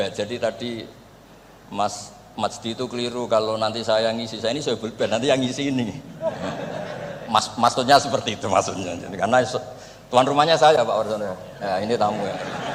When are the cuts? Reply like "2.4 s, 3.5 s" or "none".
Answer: none